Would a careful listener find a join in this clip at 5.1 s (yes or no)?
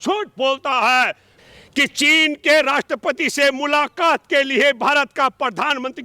no